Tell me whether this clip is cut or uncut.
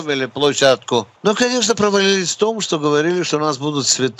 cut